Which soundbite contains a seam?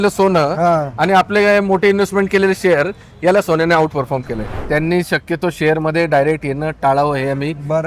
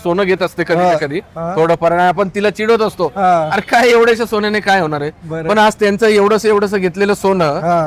first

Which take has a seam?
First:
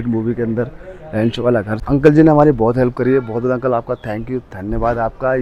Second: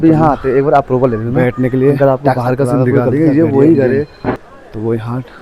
second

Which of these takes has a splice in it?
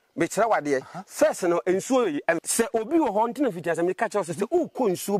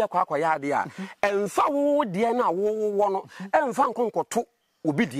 first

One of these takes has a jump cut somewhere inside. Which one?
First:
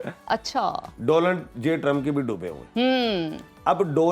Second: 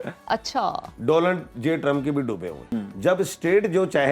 second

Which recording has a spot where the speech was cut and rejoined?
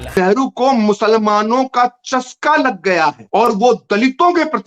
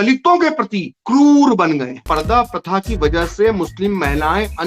second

